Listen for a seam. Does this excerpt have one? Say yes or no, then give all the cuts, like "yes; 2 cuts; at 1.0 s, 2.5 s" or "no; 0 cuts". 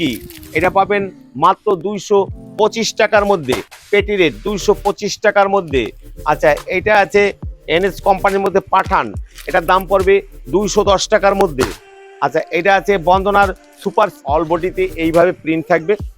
yes; 1 cut; at 14.1 s